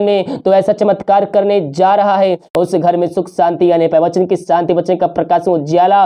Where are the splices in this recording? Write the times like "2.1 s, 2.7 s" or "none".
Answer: 2.5 s